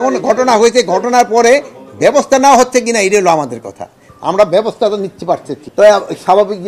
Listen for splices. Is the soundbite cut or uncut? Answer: cut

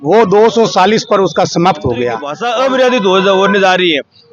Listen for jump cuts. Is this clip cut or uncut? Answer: cut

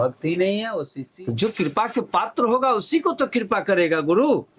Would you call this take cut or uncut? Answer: cut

